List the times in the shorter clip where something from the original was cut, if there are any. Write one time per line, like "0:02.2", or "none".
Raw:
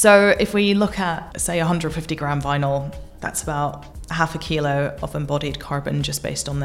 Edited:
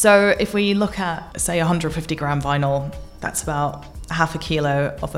none